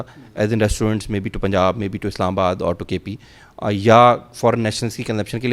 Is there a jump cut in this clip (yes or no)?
no